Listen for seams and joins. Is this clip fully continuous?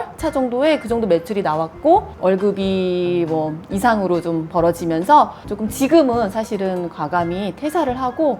no; 1 cut; at 5.4 s

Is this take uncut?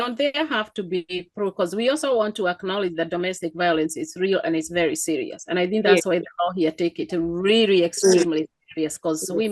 yes; 0 cuts

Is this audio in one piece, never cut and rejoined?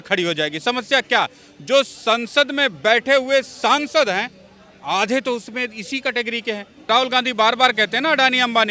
no; 1 cut; at 6.9 s

